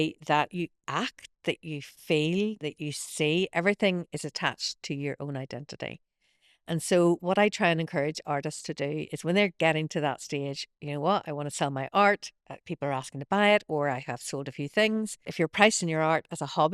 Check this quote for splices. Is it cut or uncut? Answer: cut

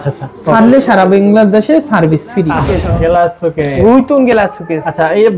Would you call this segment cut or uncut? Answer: cut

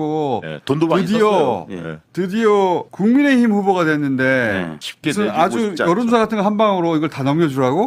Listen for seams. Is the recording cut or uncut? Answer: uncut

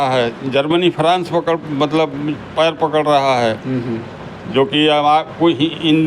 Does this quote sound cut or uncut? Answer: uncut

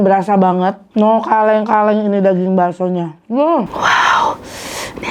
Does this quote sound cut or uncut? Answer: cut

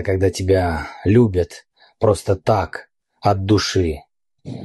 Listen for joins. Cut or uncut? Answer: uncut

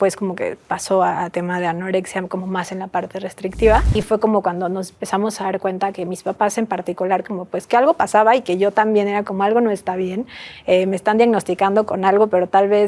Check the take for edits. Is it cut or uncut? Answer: cut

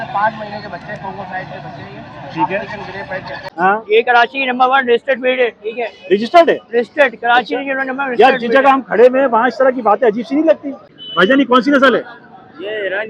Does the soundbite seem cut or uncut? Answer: cut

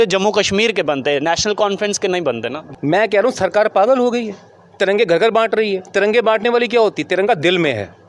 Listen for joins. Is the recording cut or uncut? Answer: cut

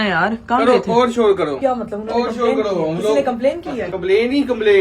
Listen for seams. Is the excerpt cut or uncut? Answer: cut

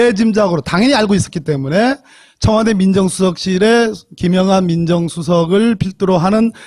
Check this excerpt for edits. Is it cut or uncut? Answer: cut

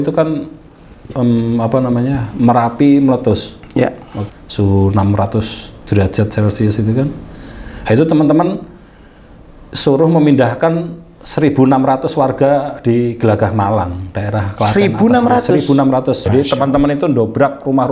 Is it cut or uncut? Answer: cut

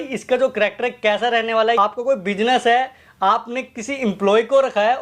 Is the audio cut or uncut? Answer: cut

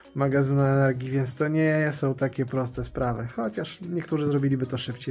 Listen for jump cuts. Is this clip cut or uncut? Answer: uncut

